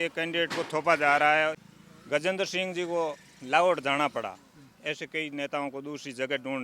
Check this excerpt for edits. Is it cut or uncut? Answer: cut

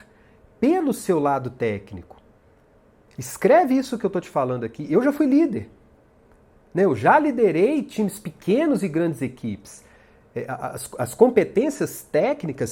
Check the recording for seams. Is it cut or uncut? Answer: uncut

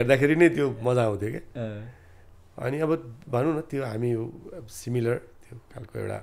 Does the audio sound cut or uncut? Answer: uncut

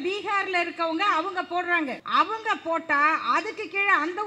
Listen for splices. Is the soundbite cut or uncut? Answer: cut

